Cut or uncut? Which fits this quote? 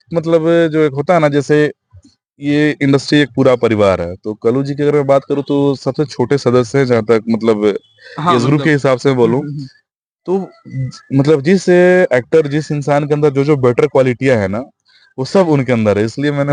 uncut